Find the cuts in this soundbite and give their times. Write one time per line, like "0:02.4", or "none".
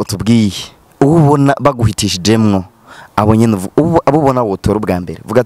none